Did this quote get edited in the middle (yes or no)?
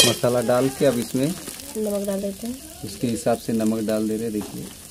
no